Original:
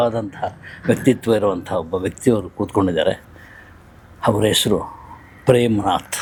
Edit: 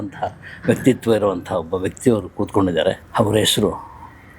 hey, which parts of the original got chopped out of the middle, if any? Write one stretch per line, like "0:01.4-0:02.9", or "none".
0:03.2-0:04.1